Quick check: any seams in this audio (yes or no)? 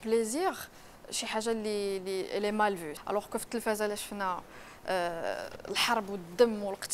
yes